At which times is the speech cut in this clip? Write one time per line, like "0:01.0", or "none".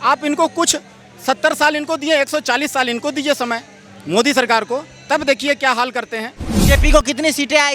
0:06.7